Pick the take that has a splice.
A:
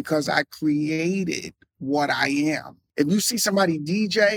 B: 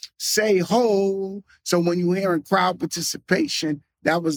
A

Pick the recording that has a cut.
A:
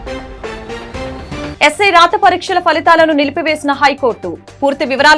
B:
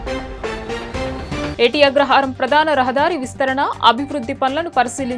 A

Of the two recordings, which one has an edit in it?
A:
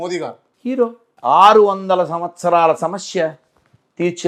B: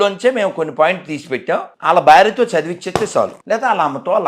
B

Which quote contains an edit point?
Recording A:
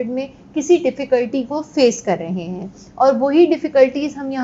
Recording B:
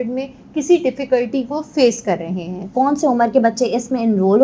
B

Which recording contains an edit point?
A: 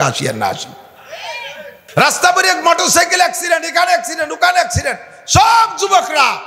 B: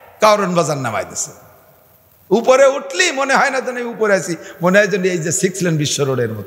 A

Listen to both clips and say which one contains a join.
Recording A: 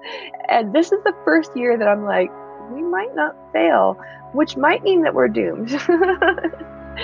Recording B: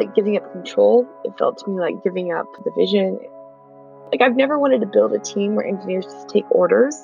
B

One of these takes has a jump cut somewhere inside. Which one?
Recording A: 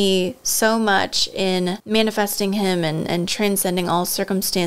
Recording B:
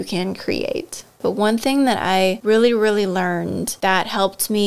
B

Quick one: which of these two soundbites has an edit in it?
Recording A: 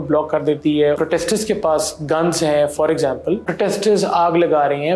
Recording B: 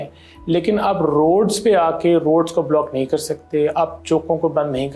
A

